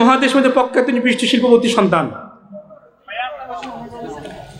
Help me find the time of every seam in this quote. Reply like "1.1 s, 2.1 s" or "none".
none